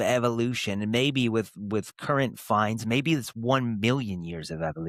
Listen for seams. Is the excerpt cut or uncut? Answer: uncut